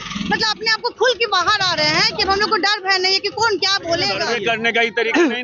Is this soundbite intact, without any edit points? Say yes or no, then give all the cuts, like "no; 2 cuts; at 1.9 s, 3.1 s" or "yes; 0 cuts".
no; 1 cut; at 4.2 s